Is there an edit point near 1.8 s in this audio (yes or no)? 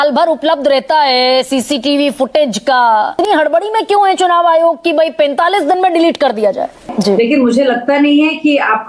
no